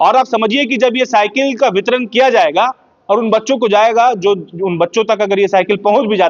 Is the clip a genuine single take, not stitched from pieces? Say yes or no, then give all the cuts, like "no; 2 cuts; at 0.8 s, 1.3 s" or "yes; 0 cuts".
yes; 0 cuts